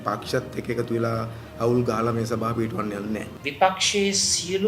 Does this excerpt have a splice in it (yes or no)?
yes